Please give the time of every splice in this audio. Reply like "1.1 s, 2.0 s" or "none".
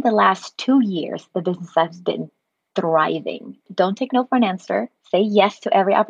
3.7 s

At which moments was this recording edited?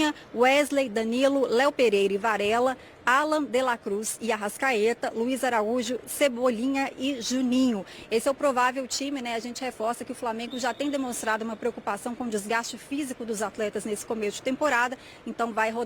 none

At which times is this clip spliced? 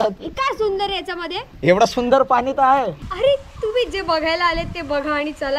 1.5 s, 3.0 s

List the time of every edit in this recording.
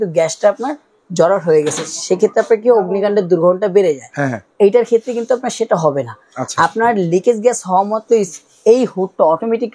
none

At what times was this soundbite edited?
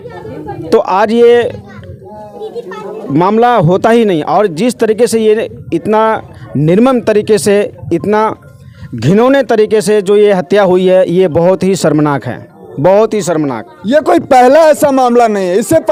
none

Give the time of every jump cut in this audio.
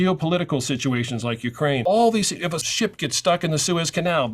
1.8 s, 2.7 s

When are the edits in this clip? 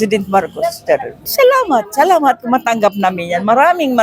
1.3 s

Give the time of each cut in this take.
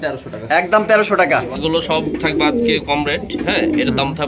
1.6 s

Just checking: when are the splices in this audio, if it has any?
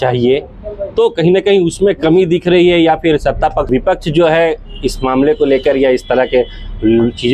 3.7 s

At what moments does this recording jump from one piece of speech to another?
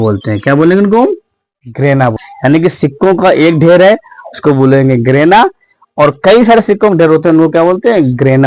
2.1 s

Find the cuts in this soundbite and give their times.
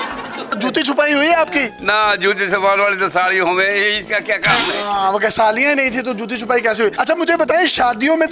none

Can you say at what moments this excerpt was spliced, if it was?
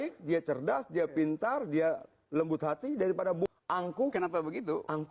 3.5 s

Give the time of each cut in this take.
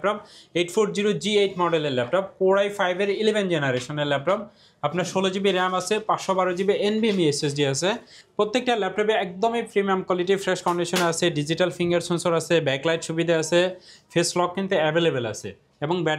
none

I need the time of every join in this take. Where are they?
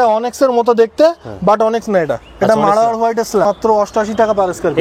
3.5 s

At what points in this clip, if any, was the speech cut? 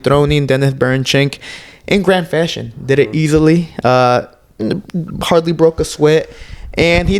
none

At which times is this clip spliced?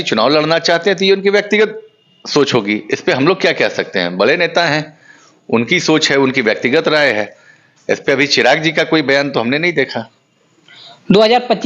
none

